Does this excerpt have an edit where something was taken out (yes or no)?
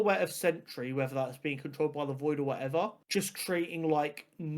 yes